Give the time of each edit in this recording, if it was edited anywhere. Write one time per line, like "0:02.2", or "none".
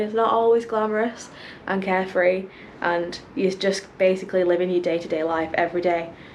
none